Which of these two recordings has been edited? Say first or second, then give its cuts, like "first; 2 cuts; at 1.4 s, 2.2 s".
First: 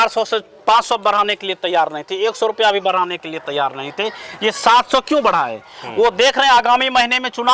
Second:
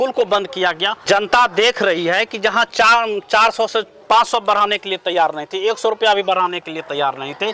second; 1 cut; at 1.0 s